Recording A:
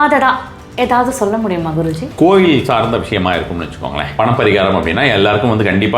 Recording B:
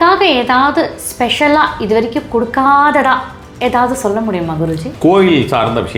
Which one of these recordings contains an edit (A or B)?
A